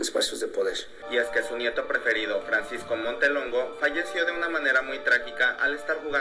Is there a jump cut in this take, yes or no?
yes